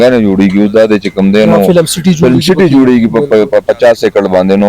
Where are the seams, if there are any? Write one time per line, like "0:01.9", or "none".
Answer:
none